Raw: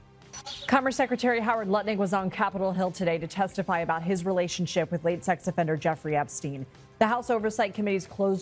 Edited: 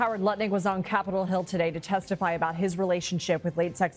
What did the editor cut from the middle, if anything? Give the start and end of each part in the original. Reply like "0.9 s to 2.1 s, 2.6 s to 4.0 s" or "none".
none